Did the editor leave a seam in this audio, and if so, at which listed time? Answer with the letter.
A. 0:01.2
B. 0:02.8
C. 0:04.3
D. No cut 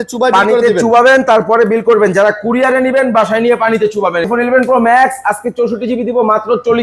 C